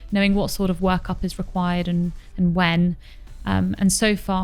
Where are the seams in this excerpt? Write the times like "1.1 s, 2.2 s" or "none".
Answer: none